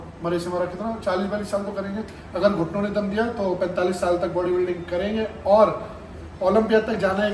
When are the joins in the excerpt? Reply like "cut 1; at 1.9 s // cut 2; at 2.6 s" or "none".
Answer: none